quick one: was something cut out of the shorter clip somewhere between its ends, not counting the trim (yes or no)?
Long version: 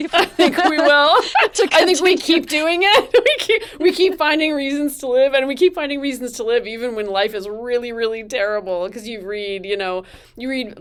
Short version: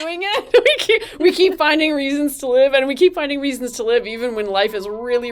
no